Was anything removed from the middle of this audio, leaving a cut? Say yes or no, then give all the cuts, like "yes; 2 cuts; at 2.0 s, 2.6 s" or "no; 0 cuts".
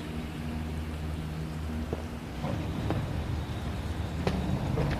yes; 1 cut; at 1.1 s